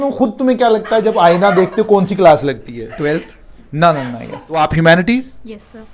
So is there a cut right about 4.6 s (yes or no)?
yes